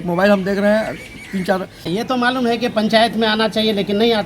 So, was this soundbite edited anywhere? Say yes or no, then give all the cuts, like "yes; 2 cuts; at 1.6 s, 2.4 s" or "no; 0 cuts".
yes; 1 cut; at 1.9 s